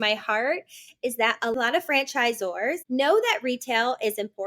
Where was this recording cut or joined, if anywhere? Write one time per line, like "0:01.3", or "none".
0:01.5
0:02.8